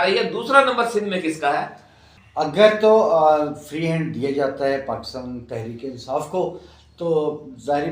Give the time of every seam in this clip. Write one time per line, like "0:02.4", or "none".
0:02.5